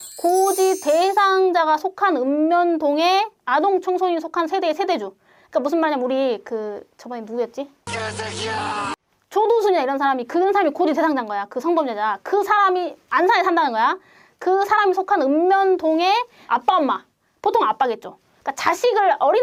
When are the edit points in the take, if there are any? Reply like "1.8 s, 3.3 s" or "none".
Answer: none